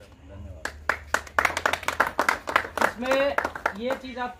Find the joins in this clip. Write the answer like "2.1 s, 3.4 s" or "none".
none